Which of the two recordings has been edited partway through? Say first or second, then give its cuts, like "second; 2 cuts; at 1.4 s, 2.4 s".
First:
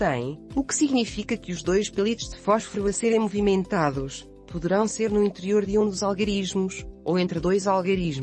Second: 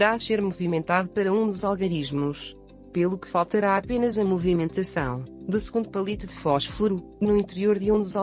first; 1 cut; at 2.6 s